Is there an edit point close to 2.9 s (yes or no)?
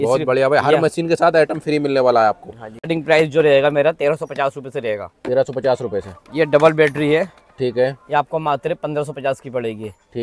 yes